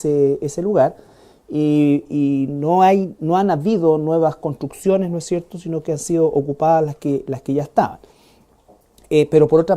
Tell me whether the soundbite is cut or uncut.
cut